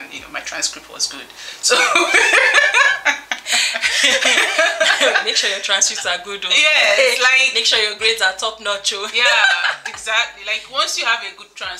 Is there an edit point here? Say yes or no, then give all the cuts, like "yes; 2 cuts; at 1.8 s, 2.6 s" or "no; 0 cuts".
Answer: no; 0 cuts